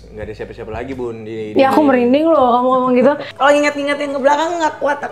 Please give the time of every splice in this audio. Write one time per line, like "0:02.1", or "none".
0:03.3